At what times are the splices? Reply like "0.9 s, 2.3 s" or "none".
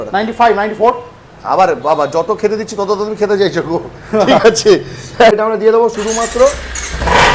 5.3 s